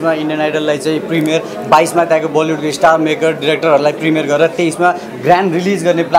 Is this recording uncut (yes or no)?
yes